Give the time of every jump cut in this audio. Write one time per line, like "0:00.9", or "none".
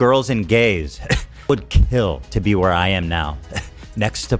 0:01.5